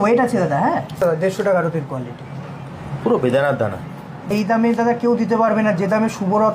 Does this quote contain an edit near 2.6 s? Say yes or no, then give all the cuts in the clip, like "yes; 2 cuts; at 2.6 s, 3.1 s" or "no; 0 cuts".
no; 2 cuts; at 1.0 s, 4.3 s